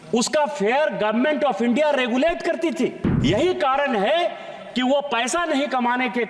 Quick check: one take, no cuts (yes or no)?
no